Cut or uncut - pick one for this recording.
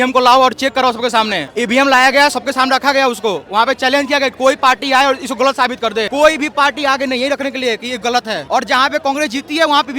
cut